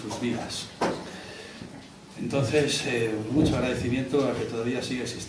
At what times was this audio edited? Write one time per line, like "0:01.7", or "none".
none